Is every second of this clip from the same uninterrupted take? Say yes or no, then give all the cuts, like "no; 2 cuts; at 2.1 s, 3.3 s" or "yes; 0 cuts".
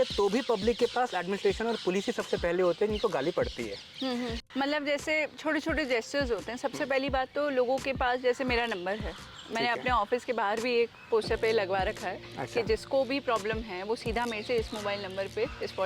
no; 1 cut; at 4.4 s